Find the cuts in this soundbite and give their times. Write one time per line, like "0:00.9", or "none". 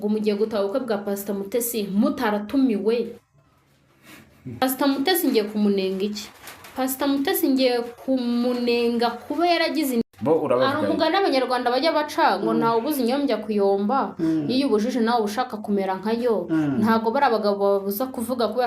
0:04.6
0:10.0